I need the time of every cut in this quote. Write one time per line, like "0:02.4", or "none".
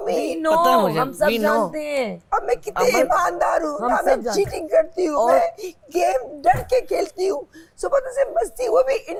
none